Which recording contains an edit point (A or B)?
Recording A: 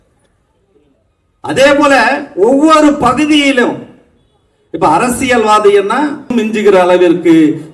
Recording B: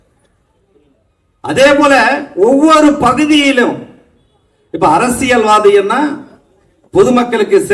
A